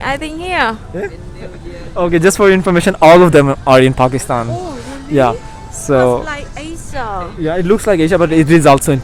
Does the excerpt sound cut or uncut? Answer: uncut